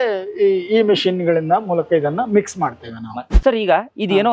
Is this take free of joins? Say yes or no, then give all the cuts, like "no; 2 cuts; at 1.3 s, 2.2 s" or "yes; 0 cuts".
no; 1 cut; at 3.0 s